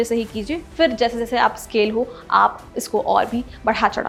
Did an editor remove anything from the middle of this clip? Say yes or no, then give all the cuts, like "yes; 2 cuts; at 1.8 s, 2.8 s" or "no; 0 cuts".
no; 0 cuts